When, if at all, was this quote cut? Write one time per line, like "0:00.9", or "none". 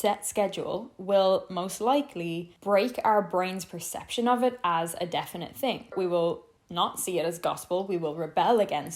0:06.0